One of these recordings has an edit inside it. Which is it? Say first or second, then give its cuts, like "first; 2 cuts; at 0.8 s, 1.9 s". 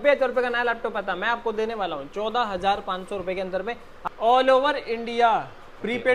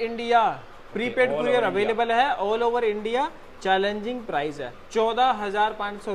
first; 1 cut; at 3.9 s